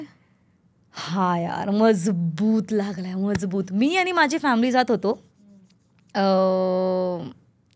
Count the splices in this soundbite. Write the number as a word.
zero